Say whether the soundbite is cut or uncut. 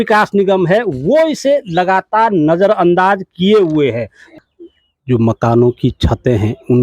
cut